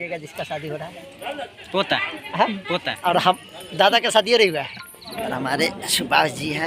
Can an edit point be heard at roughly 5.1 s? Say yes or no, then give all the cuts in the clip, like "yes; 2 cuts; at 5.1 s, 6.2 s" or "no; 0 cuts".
yes; 1 cut; at 5.1 s